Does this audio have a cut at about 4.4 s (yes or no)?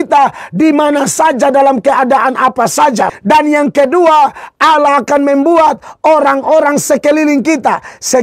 no